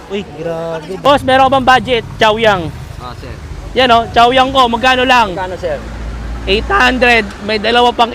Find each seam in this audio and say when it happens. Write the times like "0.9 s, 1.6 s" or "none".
1.1 s